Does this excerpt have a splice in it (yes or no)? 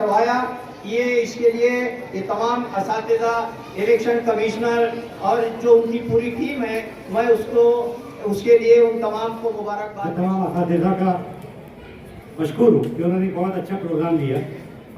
yes